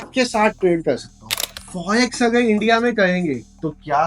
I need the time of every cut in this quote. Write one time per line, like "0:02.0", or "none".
0:01.4